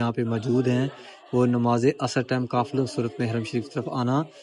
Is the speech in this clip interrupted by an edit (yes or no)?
no